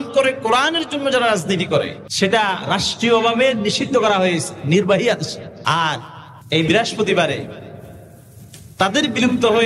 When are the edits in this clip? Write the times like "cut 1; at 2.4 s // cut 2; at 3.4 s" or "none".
cut 1; at 2.0 s // cut 2; at 5.5 s // cut 3; at 6.7 s